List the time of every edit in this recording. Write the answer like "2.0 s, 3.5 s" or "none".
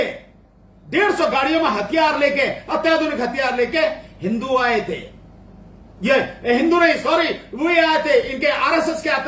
none